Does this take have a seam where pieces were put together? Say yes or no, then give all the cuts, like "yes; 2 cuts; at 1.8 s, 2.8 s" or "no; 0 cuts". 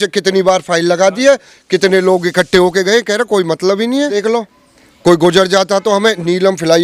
yes; 1 cut; at 4.2 s